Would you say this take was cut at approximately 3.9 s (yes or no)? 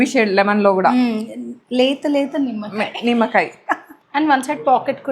yes